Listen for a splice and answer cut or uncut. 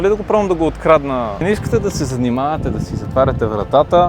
cut